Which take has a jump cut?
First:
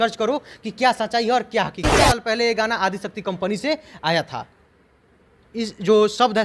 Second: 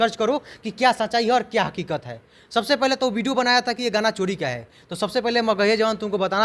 first; 1 cut; at 2.0 s

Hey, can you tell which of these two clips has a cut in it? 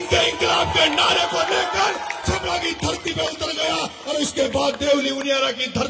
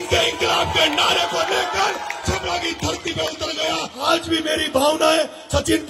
second; 1 cut; at 3.9 s

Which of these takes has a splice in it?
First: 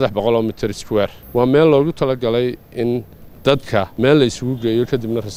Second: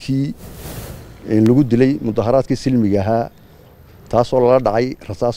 first; 2 cuts; at 1.2 s, 3.9 s

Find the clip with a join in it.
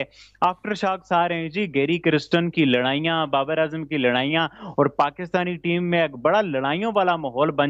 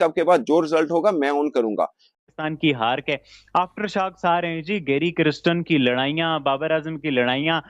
second; 1 cut; at 2.1 s

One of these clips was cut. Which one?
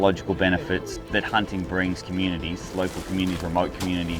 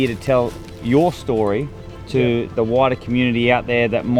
first; 1 cut; at 1.0 s

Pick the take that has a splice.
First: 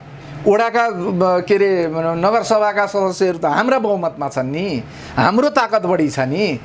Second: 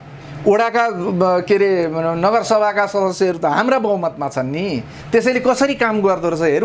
second; 1 cut; at 4.9 s

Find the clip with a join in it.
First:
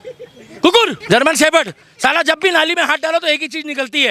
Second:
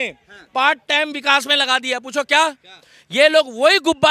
first; 1 cut; at 1.0 s

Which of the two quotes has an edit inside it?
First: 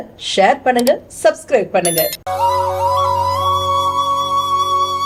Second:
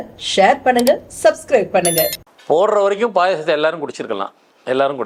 second; 1 cut; at 2.2 s

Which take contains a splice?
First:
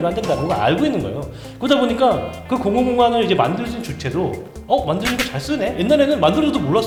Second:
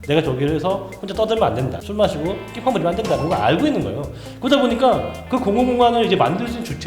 second; 1 cut; at 1.8 s

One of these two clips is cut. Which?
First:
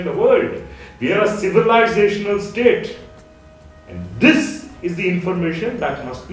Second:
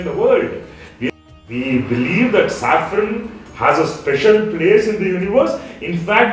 second; 1 cut; at 1.1 s

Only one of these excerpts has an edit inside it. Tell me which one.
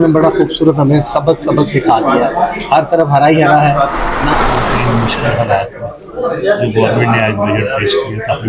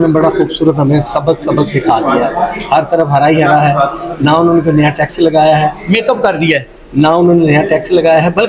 first; 1 cut; at 4.3 s

